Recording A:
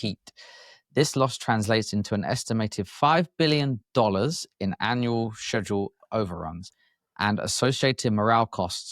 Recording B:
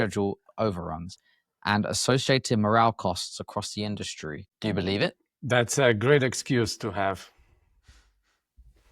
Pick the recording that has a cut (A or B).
B